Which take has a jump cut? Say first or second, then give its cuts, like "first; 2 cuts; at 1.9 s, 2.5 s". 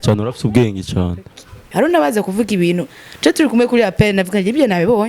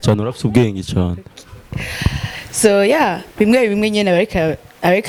first; 1 cut; at 1.7 s